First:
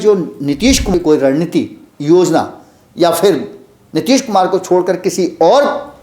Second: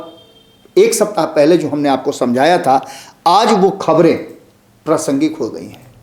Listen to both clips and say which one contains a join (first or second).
first